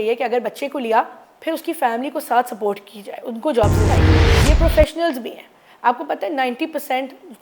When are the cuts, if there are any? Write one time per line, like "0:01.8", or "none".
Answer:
0:04.2